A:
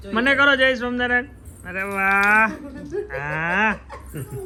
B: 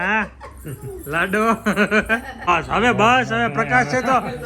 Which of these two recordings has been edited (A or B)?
B